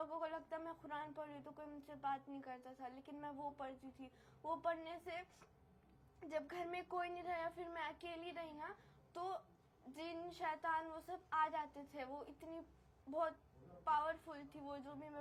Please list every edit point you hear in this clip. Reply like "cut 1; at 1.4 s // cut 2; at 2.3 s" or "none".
none